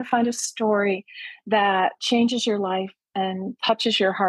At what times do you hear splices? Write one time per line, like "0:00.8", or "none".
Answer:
0:02.0